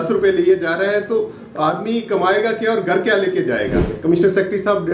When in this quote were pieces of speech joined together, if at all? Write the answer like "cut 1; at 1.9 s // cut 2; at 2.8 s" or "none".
cut 1; at 3.9 s